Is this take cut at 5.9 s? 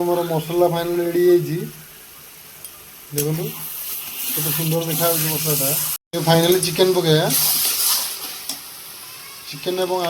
yes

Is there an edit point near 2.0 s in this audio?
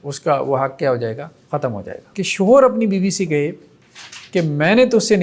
yes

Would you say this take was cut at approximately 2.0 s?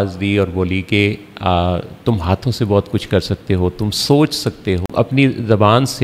no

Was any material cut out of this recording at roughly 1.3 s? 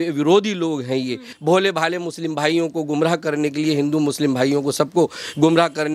yes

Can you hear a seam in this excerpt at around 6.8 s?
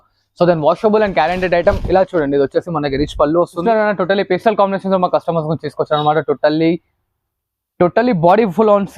no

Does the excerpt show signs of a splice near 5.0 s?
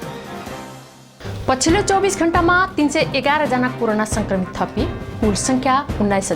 no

